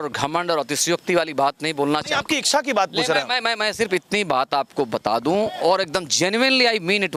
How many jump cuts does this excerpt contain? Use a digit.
0